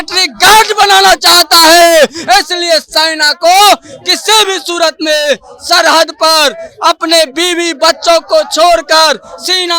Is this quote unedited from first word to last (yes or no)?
yes